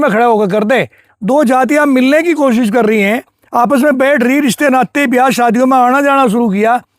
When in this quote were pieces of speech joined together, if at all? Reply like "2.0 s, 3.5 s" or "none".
1.0 s